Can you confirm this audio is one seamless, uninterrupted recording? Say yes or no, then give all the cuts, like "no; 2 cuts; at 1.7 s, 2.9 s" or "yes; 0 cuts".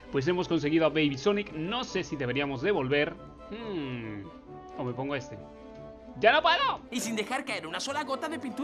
no; 1 cut; at 6.9 s